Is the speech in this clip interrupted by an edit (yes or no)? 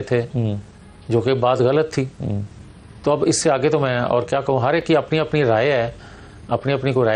no